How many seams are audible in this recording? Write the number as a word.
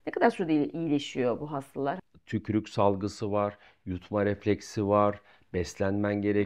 one